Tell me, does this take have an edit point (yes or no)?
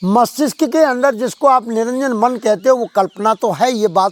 no